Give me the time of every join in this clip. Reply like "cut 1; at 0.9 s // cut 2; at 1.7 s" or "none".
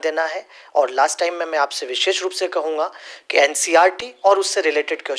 none